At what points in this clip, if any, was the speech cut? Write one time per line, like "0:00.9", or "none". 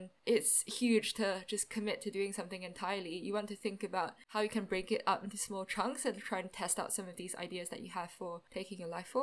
none